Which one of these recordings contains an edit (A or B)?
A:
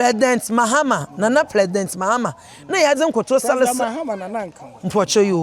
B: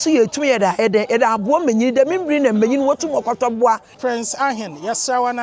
B